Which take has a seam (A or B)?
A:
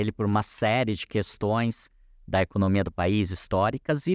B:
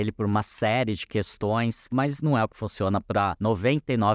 B